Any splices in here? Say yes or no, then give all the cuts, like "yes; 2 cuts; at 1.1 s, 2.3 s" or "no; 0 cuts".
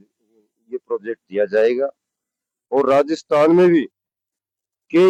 no; 0 cuts